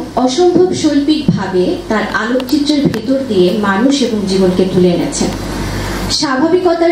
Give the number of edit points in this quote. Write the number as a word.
zero